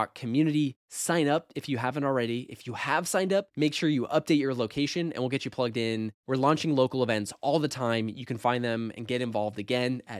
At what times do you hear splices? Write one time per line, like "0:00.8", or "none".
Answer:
none